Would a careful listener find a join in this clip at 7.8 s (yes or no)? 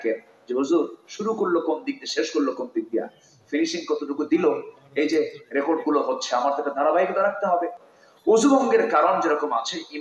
yes